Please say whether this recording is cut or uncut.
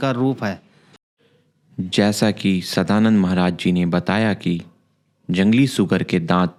uncut